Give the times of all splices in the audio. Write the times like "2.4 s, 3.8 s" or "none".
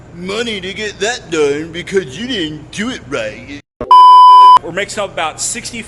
3.6 s, 4.6 s

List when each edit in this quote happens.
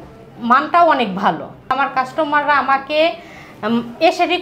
1.7 s

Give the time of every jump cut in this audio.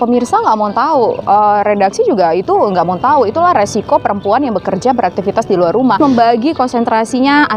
6.0 s

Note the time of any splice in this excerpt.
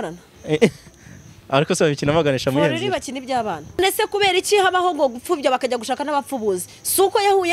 3.8 s

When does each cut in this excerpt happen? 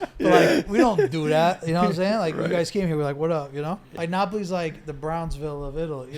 3.9 s

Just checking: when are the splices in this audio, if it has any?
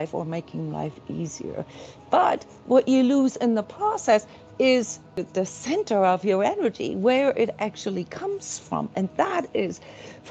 5.3 s

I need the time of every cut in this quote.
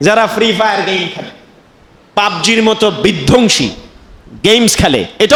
none

